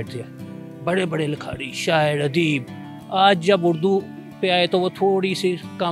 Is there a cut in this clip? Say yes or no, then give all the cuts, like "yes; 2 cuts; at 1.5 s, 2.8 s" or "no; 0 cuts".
no; 0 cuts